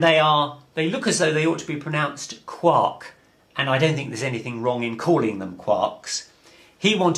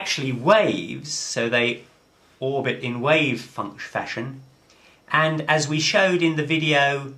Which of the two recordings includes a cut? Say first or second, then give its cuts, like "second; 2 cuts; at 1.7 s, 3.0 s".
second; 1 cut; at 5.9 s